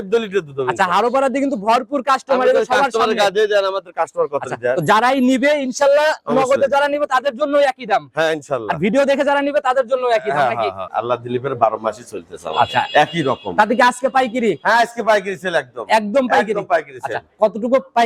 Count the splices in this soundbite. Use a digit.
1